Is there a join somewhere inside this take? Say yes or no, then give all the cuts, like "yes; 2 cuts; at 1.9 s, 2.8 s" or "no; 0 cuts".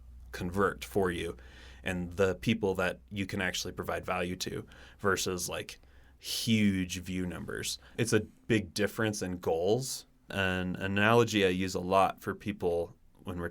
yes; 2 cuts; at 7.9 s, 10.3 s